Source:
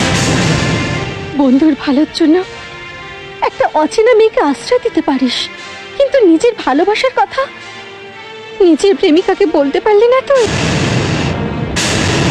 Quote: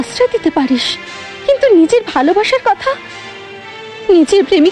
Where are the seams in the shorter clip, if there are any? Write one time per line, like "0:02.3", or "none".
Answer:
none